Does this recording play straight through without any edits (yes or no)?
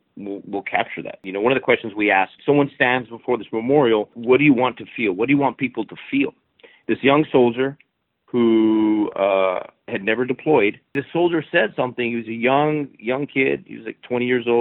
no